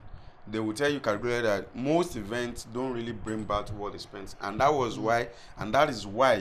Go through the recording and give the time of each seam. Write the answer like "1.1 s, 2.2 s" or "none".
none